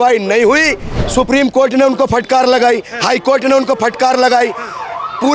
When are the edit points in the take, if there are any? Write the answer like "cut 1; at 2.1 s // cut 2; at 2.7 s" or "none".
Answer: cut 1; at 1.0 s